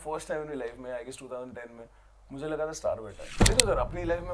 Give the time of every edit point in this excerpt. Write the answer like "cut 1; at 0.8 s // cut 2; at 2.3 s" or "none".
cut 1; at 3.3 s